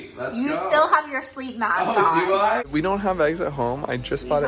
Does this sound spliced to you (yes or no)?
yes